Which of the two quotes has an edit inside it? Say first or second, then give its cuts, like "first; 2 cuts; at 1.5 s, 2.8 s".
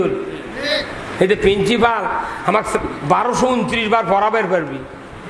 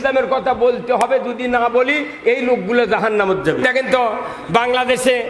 second; 1 cut; at 3.6 s